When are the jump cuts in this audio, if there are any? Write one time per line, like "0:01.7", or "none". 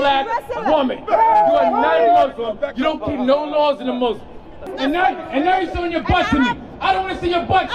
0:04.6